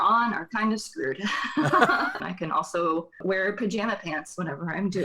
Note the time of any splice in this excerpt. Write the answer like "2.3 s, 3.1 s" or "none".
2.2 s